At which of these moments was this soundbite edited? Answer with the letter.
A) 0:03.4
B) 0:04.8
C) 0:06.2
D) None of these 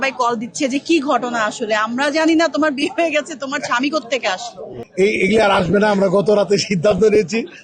B